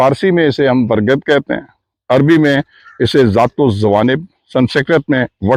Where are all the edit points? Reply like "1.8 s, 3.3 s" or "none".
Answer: none